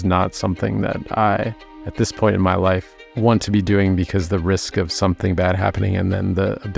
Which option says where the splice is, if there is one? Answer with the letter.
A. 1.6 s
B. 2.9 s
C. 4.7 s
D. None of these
D